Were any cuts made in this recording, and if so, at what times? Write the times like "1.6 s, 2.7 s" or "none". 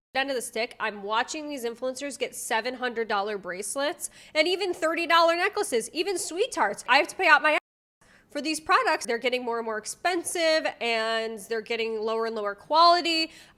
none